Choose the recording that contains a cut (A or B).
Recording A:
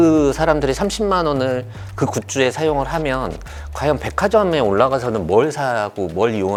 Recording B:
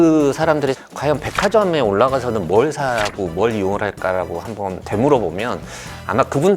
B